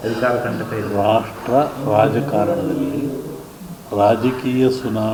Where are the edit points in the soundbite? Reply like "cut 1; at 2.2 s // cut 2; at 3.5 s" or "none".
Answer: none